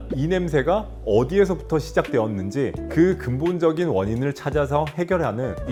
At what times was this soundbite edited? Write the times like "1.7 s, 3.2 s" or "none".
none